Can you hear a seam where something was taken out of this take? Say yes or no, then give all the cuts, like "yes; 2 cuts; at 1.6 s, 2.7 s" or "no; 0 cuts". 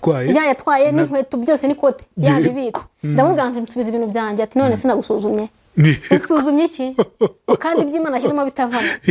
no; 0 cuts